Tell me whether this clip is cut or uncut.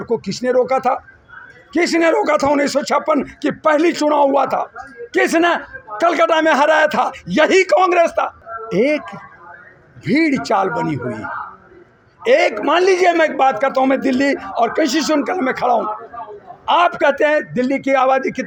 uncut